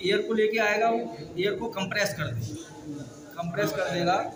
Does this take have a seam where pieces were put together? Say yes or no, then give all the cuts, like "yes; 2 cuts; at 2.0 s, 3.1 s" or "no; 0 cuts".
no; 0 cuts